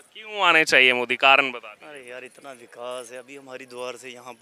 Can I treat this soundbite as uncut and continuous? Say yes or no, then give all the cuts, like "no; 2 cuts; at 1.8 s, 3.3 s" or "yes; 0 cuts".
yes; 0 cuts